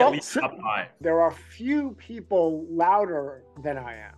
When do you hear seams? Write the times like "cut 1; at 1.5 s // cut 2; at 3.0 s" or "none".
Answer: cut 1; at 1.0 s